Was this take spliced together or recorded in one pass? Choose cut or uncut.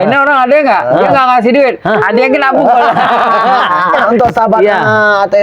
cut